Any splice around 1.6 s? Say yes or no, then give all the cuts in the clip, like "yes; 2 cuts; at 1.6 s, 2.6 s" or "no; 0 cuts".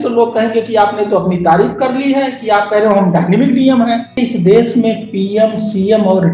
no; 1 cut; at 4.2 s